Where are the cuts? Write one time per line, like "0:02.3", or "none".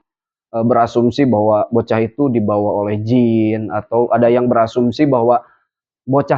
none